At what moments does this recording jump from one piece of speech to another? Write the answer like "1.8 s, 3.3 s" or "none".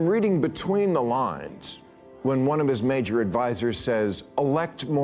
none